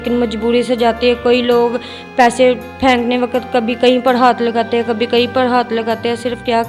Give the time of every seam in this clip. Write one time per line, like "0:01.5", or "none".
none